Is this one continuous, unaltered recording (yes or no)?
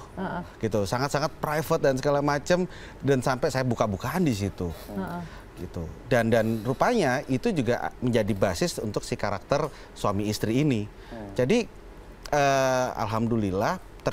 yes